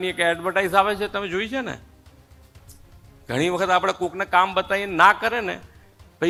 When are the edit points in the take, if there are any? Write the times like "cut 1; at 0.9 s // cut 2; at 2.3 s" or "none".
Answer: none